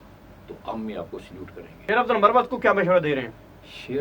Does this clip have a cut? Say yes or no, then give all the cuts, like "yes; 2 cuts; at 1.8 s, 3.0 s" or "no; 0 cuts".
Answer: yes; 1 cut; at 1.7 s